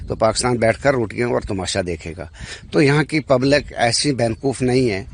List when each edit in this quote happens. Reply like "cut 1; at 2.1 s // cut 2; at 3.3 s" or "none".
none

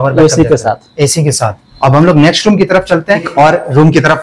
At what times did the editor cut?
cut 1; at 1.6 s // cut 2; at 3.3 s

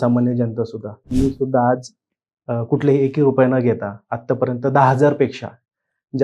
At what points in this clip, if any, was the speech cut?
cut 1; at 1.0 s

